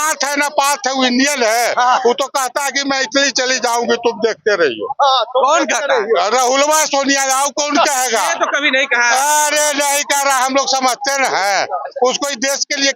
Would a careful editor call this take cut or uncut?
uncut